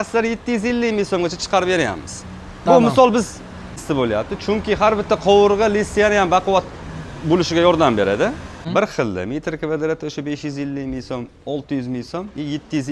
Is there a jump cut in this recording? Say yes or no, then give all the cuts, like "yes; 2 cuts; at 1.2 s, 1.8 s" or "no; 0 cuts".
yes; 2 cuts; at 3.9 s, 8.6 s